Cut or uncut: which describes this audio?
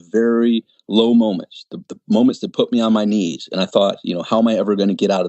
uncut